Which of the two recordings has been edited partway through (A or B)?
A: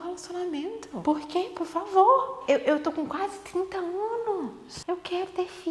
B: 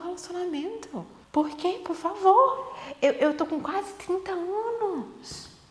A